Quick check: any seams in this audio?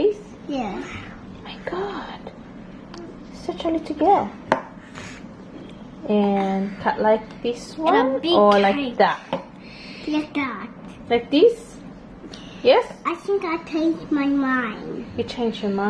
no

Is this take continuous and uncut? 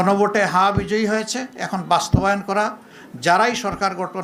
yes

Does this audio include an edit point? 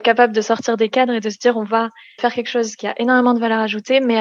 yes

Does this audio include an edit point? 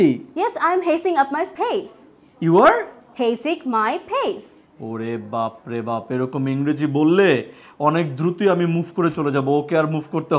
no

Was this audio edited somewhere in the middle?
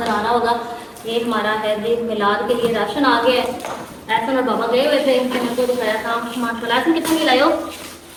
no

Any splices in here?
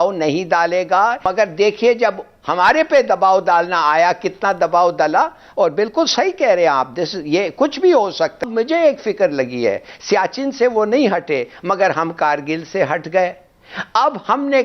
yes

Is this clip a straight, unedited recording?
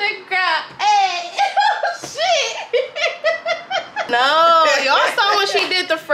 no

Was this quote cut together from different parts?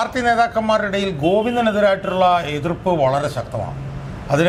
no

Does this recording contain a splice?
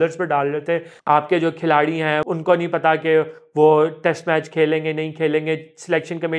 yes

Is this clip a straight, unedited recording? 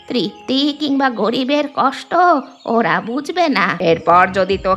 no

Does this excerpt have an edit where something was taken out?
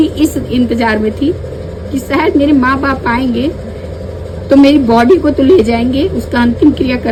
no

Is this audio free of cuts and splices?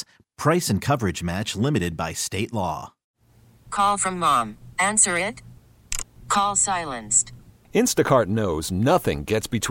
no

